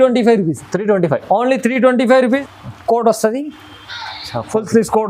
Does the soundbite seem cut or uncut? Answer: cut